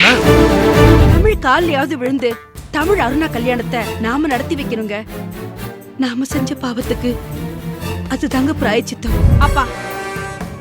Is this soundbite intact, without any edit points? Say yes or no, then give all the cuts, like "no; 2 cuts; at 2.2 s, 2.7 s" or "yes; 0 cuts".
no; 2 cuts; at 1.1 s, 9.3 s